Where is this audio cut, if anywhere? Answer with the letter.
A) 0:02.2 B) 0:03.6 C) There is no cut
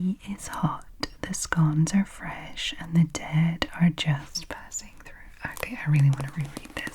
C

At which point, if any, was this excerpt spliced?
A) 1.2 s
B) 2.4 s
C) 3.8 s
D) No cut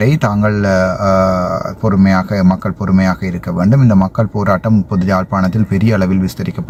D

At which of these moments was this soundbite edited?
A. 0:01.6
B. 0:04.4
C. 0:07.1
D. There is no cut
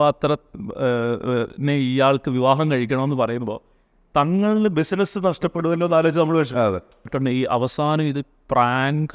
C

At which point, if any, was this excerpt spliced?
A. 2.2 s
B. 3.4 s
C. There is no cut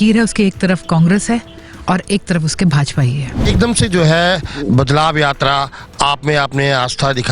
B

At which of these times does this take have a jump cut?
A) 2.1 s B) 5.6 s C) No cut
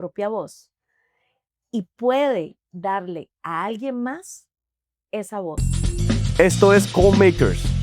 B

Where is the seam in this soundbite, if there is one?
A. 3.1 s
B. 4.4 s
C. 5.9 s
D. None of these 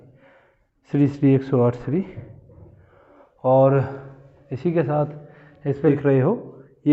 C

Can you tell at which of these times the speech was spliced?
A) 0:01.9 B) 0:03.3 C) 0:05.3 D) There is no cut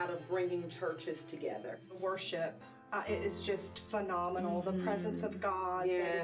A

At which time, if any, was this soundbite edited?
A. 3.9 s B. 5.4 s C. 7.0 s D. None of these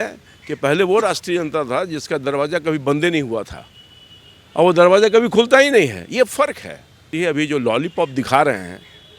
C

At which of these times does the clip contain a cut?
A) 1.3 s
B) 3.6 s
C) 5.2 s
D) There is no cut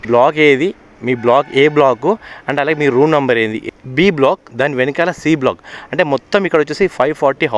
B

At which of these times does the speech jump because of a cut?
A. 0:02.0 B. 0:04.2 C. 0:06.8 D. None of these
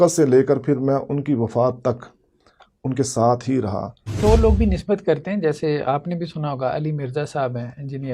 B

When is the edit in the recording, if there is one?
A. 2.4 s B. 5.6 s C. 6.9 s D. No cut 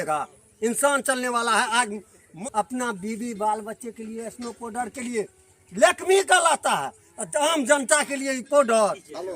A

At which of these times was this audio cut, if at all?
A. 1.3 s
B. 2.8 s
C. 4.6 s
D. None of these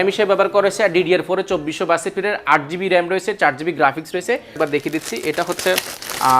C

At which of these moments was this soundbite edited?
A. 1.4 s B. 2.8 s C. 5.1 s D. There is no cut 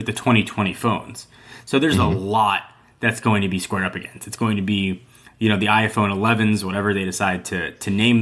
D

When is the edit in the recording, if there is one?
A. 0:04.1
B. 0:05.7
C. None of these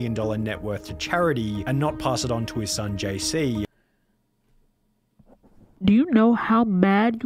B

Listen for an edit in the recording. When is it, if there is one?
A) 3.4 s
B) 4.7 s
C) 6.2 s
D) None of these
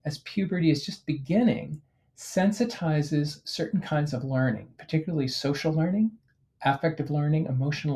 D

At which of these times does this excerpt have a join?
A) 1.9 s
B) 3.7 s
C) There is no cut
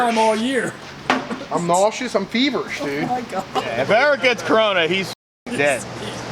B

